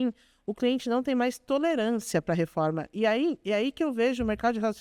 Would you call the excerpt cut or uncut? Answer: uncut